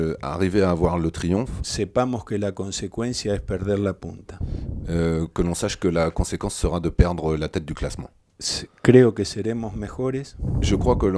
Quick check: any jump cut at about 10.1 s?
no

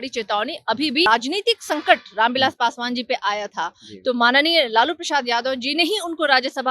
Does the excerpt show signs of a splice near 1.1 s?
yes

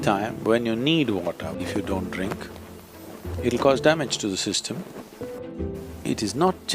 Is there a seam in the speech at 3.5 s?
no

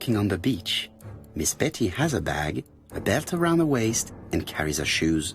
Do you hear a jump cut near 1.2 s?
no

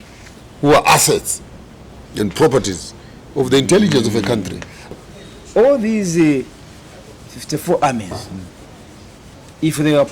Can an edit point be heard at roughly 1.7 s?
no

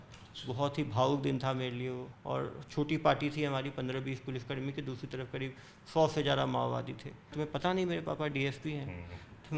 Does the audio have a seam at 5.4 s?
no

